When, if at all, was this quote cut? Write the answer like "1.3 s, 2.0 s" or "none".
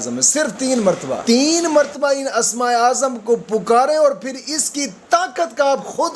1.2 s